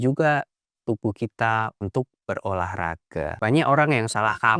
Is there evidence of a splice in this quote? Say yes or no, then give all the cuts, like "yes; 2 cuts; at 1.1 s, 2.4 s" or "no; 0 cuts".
yes; 1 cut; at 3.3 s